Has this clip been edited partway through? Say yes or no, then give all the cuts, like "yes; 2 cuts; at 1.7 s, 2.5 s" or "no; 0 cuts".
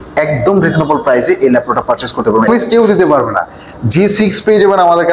yes; 1 cut; at 2.5 s